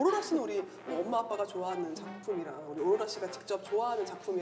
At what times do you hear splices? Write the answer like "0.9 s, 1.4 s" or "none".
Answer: none

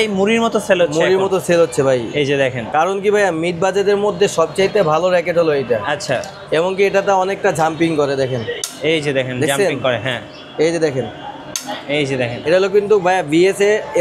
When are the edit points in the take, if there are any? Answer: 2.6 s, 12.4 s

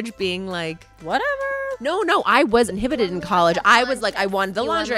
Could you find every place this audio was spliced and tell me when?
1.8 s, 2.7 s

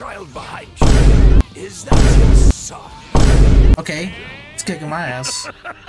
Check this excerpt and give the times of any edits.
3.8 s

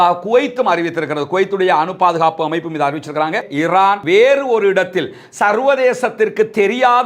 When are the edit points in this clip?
3.5 s

